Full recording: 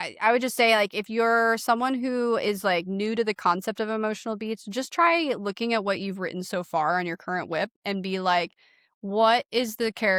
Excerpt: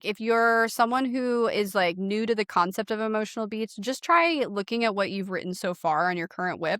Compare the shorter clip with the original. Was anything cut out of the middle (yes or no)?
no